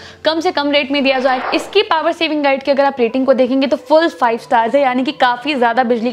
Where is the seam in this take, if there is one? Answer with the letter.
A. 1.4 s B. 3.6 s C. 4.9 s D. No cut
A